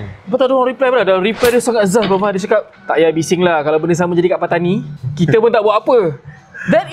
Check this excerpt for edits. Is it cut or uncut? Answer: cut